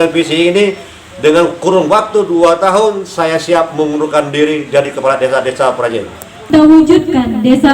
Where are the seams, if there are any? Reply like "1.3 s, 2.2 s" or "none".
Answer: 6.5 s